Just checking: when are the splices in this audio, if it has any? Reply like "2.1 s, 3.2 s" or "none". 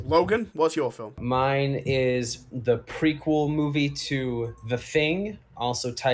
1.1 s